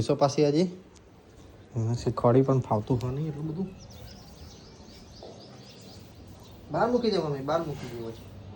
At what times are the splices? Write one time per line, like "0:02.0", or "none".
none